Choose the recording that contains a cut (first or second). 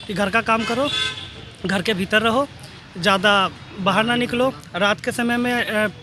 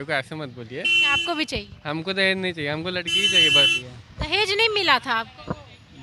second